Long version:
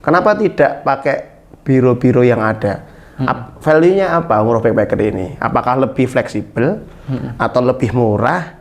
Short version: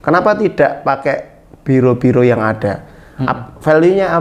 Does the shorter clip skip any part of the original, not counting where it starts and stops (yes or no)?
no